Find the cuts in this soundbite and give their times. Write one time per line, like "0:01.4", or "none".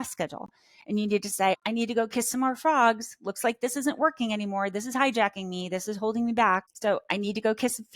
0:01.6
0:06.7